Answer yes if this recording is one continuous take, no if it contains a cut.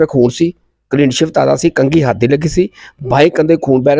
yes